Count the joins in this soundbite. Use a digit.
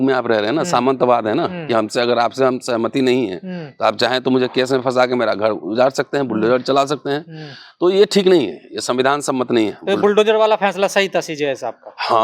0